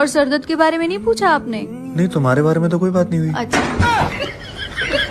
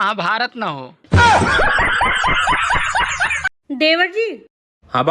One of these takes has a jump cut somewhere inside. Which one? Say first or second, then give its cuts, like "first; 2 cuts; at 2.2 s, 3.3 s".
second; 1 cut; at 3.6 s